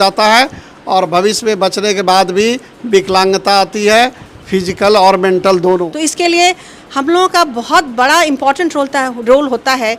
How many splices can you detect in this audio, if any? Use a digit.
1